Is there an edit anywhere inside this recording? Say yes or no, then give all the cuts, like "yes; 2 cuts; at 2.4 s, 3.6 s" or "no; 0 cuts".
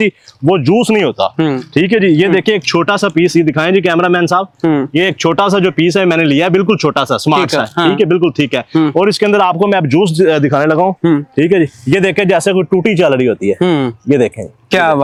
no; 0 cuts